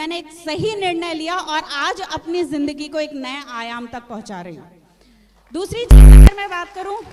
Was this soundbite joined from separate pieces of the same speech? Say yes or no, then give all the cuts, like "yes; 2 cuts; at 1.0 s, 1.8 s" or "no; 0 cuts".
no; 0 cuts